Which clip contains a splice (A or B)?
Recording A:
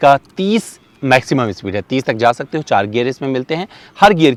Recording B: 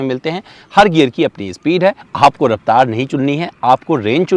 B